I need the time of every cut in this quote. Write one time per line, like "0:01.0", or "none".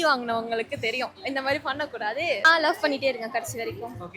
0:02.4

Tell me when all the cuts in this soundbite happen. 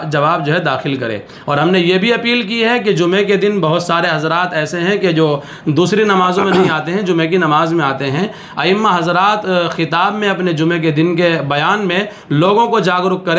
none

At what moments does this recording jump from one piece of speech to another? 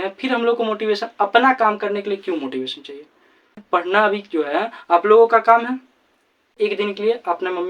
0:03.6
0:06.6

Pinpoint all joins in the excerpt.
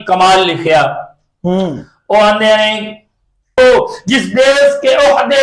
0:03.6

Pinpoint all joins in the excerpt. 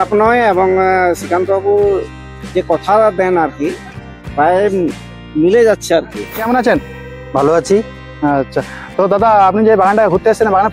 0:06.2

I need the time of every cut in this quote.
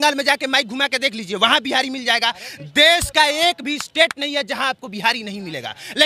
none

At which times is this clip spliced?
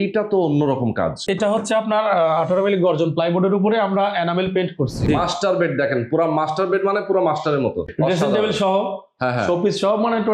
0:01.3
0:05.0
0:07.9

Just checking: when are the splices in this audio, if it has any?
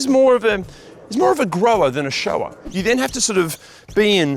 0:02.6

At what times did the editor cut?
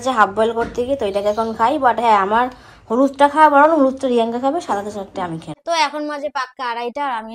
0:05.5

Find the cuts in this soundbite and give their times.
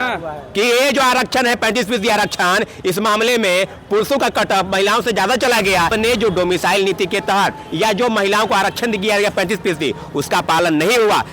0:05.9

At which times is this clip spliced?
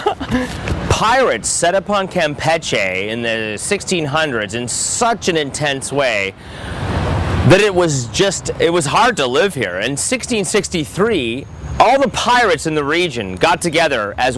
none

